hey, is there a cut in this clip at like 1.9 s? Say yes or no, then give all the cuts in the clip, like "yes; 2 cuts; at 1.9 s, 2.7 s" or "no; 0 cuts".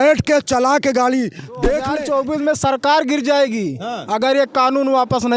yes; 1 cut; at 1.9 s